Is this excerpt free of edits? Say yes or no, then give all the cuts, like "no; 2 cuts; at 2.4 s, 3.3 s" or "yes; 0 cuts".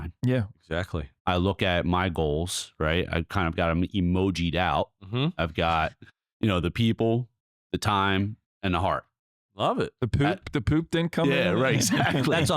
no; 1 cut; at 1.1 s